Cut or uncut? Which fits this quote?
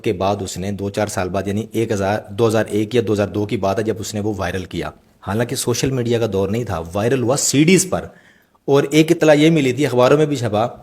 cut